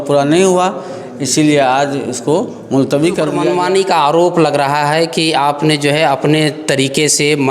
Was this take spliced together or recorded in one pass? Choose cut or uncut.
cut